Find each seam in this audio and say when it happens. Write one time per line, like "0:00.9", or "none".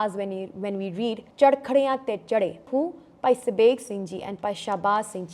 0:01.2
0:02.6